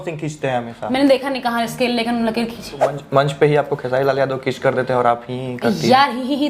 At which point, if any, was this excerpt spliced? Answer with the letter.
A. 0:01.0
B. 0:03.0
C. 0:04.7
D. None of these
B